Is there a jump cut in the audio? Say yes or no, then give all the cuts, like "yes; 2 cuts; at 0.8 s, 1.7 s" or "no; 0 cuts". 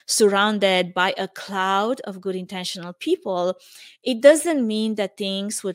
no; 0 cuts